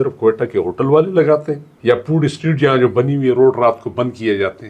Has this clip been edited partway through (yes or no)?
yes